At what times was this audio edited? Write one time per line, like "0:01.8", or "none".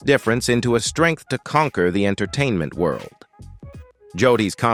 none